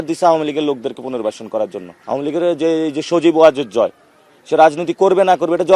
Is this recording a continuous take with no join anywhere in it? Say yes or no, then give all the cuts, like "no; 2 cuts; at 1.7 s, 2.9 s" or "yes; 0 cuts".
no; 1 cut; at 1.9 s